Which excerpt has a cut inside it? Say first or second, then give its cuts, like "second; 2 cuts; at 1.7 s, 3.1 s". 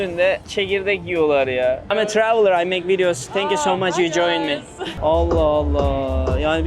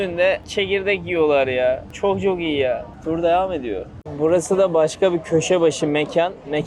first; 2 cuts; at 1.8 s, 4.9 s